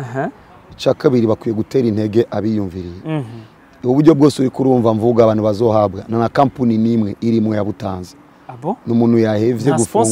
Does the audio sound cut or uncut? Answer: uncut